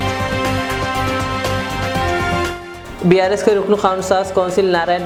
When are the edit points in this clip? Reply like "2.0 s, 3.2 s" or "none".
none